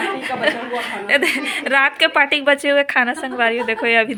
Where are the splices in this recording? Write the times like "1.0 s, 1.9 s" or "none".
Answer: none